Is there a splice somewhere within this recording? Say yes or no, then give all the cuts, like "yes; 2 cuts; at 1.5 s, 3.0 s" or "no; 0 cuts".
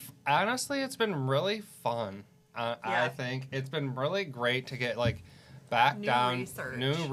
no; 0 cuts